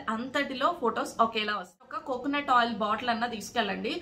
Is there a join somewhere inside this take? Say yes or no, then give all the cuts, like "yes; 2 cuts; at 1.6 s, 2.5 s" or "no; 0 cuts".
yes; 1 cut; at 2.0 s